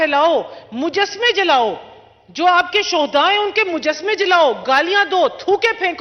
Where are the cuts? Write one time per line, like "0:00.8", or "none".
none